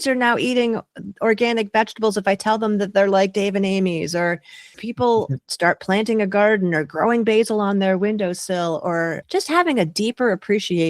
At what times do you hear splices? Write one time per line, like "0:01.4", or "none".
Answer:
0:04.8
0:09.2